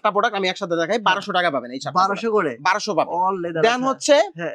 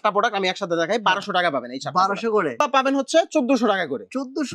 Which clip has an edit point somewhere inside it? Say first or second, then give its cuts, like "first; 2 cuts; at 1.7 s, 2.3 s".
second; 1 cut; at 2.6 s